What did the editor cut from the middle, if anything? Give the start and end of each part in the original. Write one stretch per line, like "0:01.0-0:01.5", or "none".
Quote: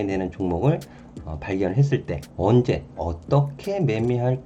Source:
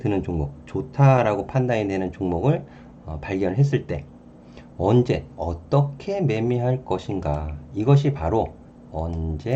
0:04.0-0:04.6